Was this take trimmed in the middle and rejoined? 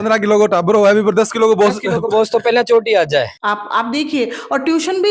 yes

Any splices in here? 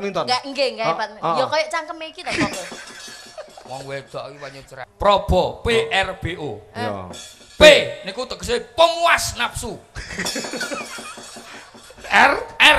yes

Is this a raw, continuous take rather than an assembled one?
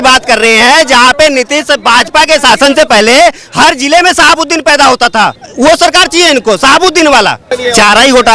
no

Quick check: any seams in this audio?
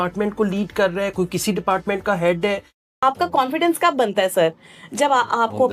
yes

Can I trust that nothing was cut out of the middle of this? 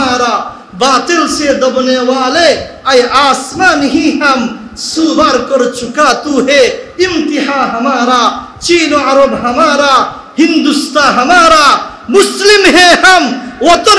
yes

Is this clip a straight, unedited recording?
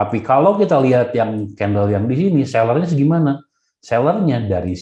yes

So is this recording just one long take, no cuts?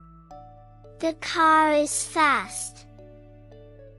no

